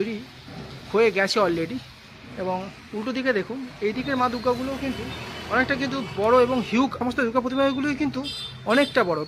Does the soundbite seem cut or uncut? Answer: cut